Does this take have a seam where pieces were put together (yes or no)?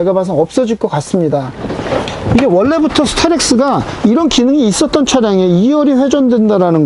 yes